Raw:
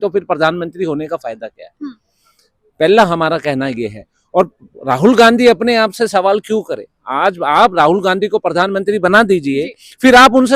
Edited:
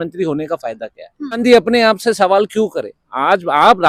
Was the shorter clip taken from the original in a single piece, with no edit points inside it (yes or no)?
no